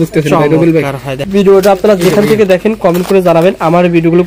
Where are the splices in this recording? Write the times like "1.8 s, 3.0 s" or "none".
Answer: 1.1 s